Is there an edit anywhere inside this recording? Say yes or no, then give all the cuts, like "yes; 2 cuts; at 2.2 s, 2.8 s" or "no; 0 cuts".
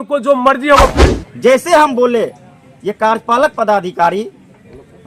yes; 1 cut; at 1.0 s